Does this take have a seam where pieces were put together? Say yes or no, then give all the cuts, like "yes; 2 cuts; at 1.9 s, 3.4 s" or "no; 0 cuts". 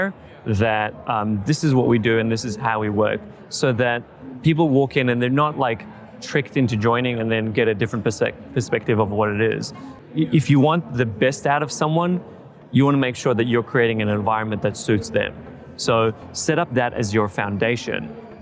yes; 1 cut; at 9.9 s